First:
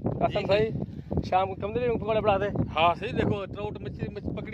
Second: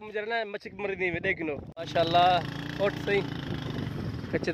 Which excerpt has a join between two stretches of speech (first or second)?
second